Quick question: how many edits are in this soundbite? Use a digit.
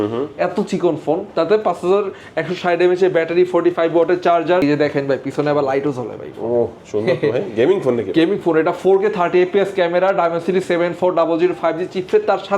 1